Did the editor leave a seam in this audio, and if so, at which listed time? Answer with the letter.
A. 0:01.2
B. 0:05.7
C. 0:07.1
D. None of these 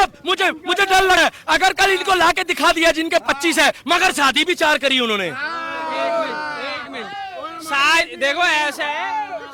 A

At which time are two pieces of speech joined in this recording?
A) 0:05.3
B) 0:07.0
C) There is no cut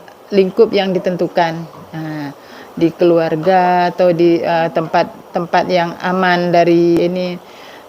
B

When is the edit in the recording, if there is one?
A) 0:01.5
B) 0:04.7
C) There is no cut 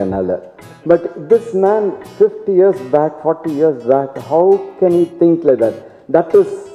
C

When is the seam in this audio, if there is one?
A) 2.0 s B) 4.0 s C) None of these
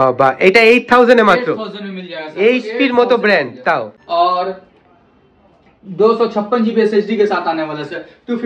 B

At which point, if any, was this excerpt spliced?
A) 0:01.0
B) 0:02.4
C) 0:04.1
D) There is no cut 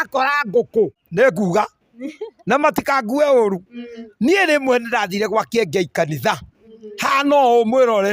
A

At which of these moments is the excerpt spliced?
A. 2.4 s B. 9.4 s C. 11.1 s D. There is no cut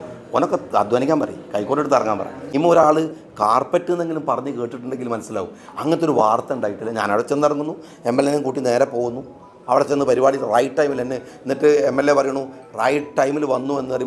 A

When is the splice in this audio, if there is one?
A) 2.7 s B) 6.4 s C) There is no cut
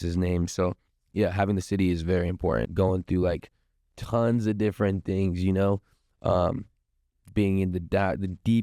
A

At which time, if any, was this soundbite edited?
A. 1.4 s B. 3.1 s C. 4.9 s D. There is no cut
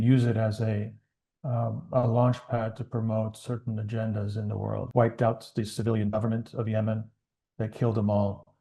C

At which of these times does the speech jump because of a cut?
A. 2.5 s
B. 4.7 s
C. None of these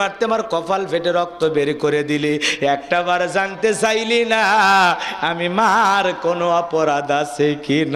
C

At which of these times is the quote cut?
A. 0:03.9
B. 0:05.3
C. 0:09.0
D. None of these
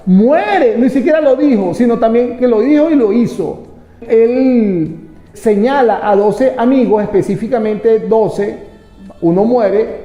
B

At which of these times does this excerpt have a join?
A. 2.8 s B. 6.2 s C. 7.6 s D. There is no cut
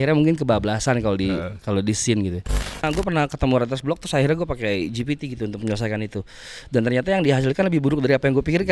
A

